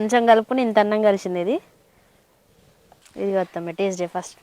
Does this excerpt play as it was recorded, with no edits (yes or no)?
no